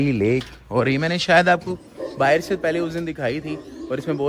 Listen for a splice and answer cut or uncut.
uncut